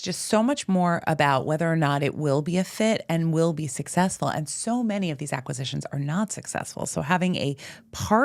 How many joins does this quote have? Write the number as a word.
zero